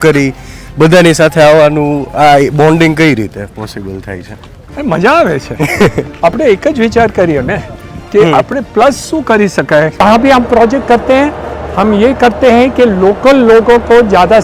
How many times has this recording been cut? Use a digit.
1